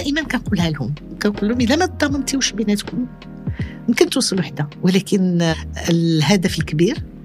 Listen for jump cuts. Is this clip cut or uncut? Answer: cut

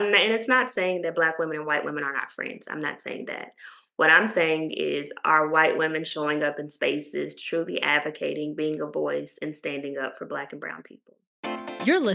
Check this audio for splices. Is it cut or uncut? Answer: cut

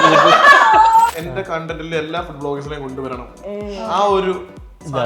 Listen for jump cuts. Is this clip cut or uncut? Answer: cut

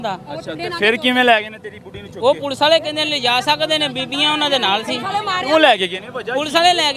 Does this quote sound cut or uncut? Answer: uncut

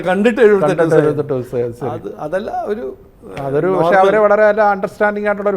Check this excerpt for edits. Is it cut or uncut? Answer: uncut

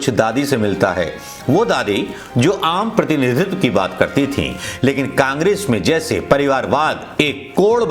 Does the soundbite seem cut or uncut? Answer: uncut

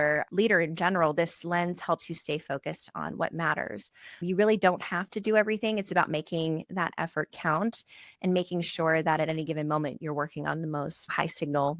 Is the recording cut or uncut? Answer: uncut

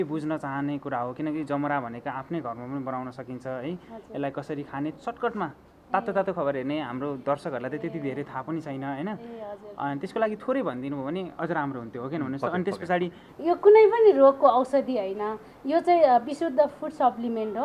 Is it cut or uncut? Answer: cut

